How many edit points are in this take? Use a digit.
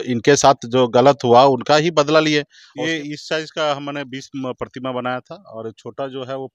1